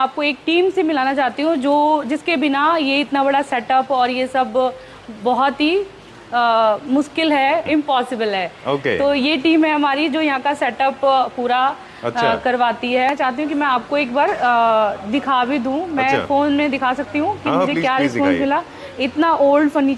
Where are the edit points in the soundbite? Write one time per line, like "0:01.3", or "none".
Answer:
0:07.7
0:13.1